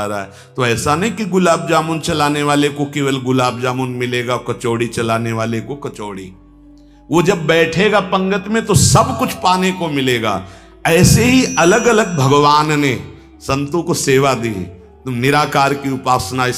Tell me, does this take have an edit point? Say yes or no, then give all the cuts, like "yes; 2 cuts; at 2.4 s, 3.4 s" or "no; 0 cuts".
no; 0 cuts